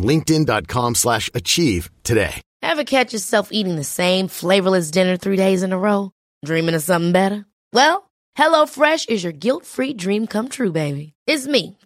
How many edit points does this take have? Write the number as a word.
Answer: one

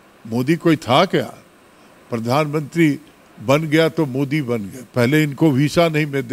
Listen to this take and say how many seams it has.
zero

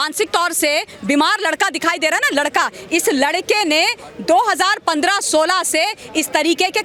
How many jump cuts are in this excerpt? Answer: zero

